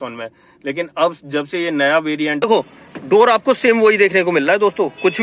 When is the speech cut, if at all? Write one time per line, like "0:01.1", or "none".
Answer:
0:02.4